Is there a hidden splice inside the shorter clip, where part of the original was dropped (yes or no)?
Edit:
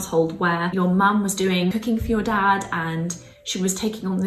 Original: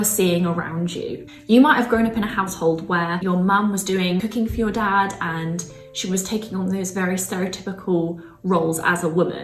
no